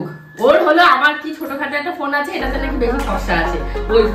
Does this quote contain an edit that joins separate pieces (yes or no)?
no